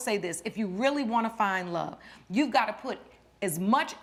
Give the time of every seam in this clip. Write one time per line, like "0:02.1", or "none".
none